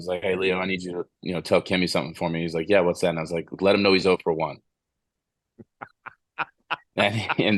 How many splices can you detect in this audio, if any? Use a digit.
0